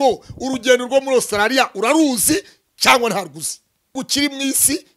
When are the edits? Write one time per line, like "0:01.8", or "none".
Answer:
0:03.9